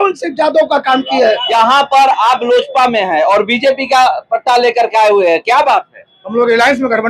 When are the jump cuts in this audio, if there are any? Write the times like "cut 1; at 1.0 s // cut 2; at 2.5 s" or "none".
cut 1; at 1.5 s